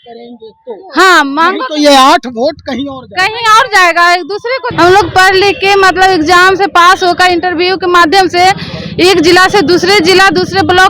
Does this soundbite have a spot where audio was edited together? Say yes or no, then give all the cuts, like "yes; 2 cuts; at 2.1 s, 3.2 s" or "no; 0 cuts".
yes; 1 cut; at 4.6 s